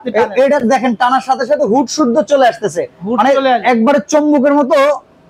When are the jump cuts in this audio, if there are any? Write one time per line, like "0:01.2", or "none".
none